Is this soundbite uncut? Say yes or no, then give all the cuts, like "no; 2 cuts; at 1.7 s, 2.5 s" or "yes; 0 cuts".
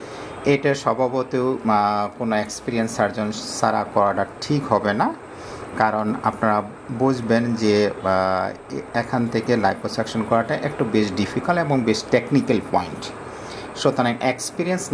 yes; 0 cuts